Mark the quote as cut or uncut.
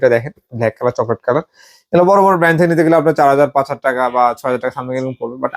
uncut